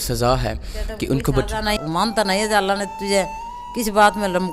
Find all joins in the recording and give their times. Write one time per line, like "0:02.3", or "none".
0:01.8

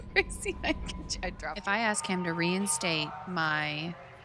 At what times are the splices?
0:01.2

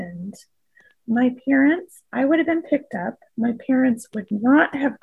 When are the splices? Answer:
none

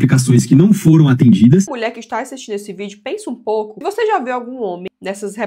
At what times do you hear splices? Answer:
0:01.7
0:03.8

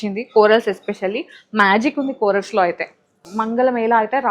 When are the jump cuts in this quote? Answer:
0:03.3

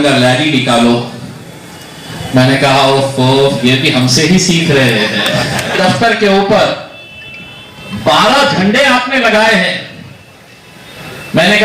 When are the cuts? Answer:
0:05.7

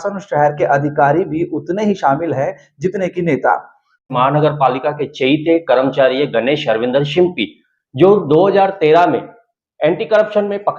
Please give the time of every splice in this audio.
0:04.1

